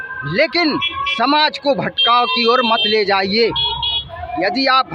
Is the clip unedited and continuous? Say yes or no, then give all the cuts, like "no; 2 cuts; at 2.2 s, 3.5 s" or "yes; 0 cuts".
yes; 0 cuts